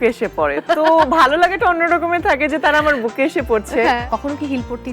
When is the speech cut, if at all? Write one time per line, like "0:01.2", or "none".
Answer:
0:04.0

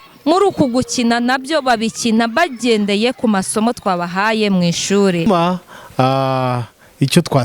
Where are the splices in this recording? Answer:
0:05.3

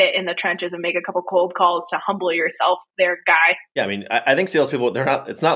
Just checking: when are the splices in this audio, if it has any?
0:03.6

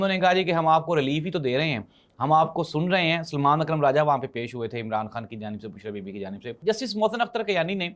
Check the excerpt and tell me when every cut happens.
0:06.5

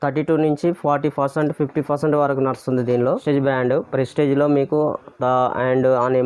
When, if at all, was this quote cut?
0:03.2

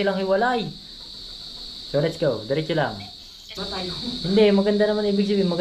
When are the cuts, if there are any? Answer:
0:03.6

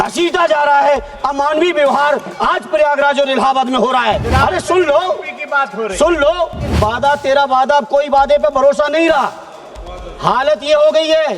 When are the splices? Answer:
0:04.2
0:06.7

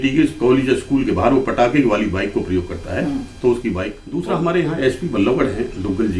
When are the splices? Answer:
0:04.0

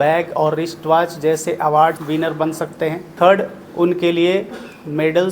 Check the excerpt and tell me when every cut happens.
0:02.0
0:03.1

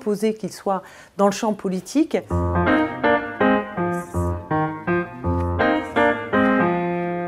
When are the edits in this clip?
0:02.3

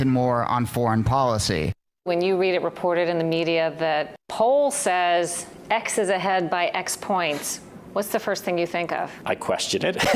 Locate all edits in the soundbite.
0:02.1
0:04.2
0:09.2

